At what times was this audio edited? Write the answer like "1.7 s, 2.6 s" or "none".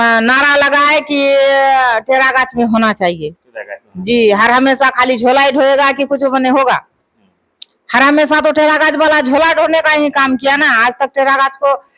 none

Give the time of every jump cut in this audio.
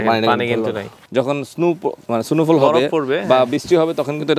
1.0 s

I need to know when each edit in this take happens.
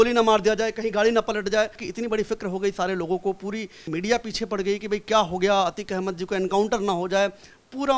1.9 s, 3.8 s

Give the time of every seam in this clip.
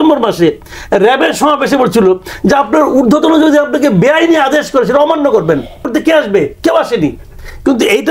5.9 s

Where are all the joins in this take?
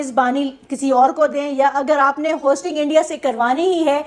none

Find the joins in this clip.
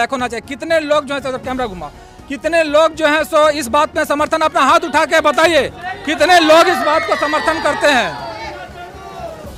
none

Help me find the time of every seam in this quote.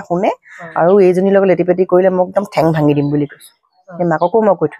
3.9 s

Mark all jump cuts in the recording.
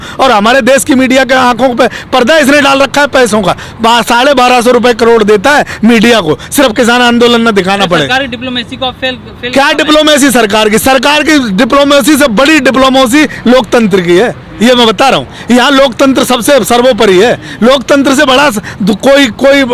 none

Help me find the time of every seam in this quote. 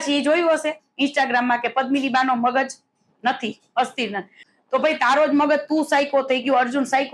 4.4 s

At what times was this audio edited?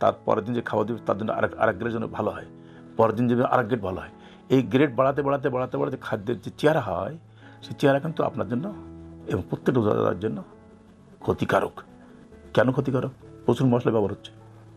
none

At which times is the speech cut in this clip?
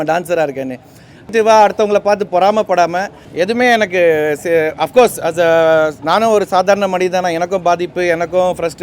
1.3 s, 3.2 s

